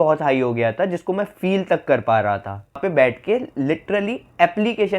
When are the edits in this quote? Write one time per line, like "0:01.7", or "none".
0:02.8